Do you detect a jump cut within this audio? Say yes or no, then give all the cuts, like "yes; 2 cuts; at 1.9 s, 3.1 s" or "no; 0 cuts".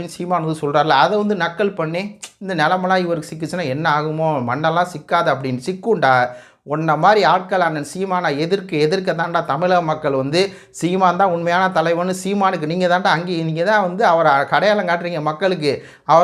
no; 0 cuts